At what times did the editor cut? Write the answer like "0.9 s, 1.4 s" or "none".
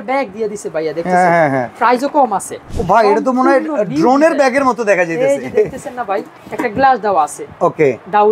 2.6 s, 6.4 s